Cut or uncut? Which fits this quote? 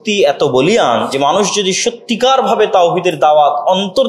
cut